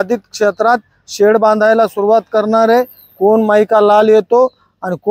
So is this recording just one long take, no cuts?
yes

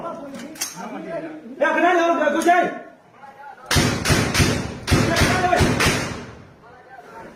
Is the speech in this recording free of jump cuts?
yes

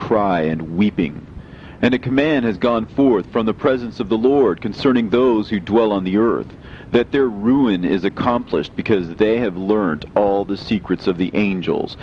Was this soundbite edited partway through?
yes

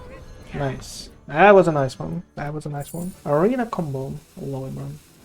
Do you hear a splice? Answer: yes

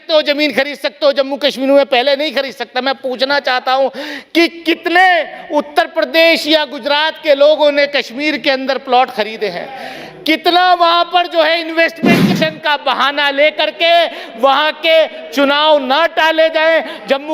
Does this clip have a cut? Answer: yes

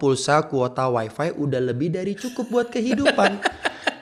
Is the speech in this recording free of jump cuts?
yes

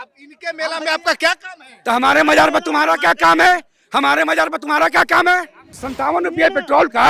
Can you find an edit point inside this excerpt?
yes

